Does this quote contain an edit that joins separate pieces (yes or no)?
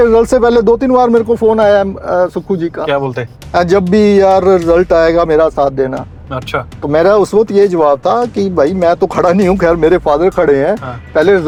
no